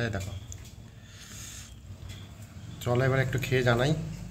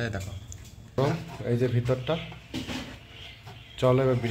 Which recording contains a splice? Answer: second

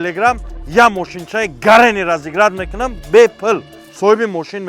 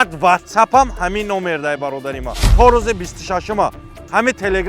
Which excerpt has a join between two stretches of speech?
second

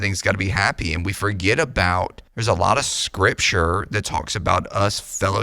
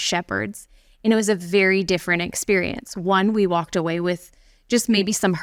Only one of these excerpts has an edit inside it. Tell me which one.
first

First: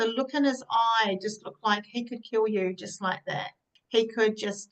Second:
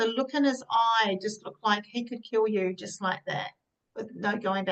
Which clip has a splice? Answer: first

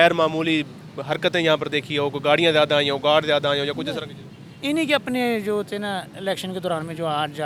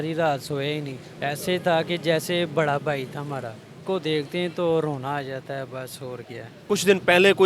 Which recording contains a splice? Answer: second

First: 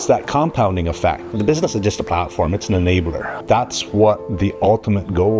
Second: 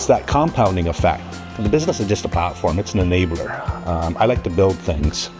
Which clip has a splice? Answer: first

